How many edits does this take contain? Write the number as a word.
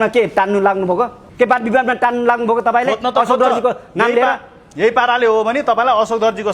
one